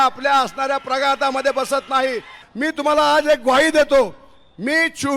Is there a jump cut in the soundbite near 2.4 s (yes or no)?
yes